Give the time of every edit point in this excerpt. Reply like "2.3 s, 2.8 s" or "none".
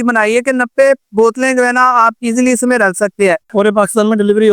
3.5 s